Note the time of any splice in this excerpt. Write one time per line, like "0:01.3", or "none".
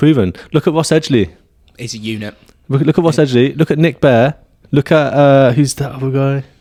none